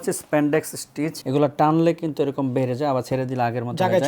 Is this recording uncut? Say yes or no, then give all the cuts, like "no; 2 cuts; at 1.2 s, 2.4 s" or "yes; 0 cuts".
no; 1 cut; at 1.2 s